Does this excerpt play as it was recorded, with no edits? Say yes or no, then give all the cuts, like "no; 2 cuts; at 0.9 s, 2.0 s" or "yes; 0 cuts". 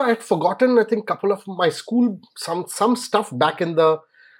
yes; 0 cuts